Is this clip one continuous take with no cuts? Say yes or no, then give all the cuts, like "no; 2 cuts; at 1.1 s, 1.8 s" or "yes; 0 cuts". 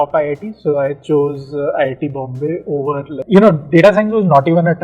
no; 1 cut; at 3.2 s